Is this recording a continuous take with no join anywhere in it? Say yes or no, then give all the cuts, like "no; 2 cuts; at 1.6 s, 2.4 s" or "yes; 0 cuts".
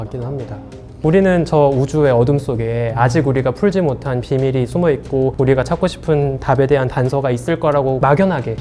no; 1 cut; at 0.9 s